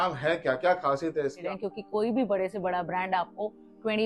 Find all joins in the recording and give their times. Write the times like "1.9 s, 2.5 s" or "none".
1.4 s